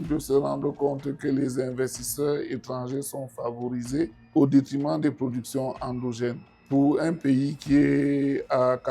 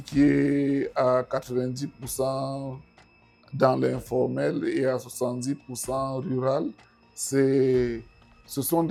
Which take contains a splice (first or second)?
first